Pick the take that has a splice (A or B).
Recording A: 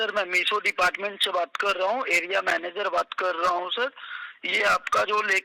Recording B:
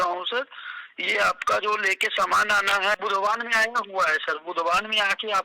B